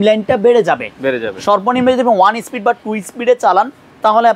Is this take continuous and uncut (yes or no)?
yes